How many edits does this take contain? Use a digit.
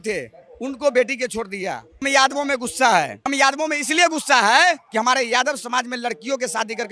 3